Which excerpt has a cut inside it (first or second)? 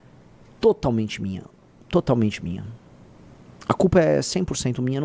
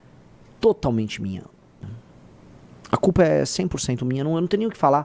second